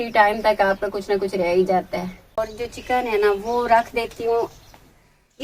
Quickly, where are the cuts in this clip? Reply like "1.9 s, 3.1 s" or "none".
2.4 s